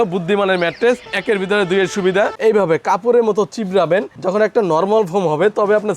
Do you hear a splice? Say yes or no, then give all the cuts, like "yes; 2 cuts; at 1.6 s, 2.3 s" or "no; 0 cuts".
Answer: yes; 1 cut; at 2.3 s